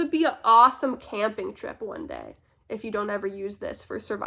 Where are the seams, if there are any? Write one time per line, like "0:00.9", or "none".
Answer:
none